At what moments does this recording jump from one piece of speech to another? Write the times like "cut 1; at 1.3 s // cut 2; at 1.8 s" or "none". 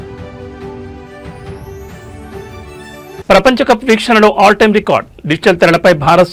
cut 1; at 2.6 s

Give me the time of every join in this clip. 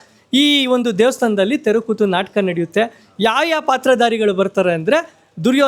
none

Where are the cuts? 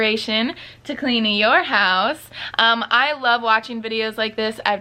none

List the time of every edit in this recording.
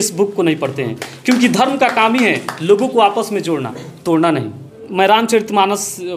cut 1; at 4.8 s

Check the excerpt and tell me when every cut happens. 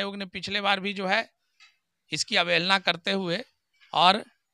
none

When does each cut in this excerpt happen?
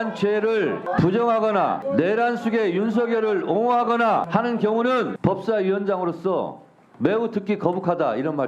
cut 1; at 0.8 s // cut 2; at 1.8 s // cut 3; at 4.3 s // cut 4; at 5.1 s

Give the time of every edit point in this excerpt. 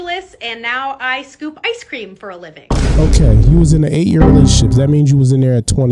cut 1; at 2.9 s

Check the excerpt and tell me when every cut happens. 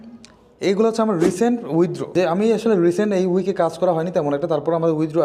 cut 1; at 2.0 s

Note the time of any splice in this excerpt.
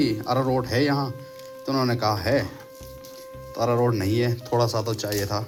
none

